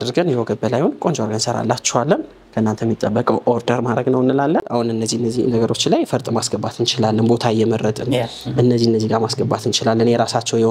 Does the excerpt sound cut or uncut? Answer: cut